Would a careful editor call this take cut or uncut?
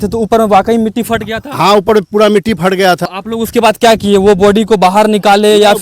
cut